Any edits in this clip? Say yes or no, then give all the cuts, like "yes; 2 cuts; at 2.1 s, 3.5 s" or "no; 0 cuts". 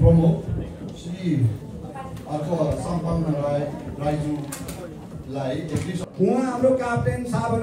yes; 1 cut; at 6.0 s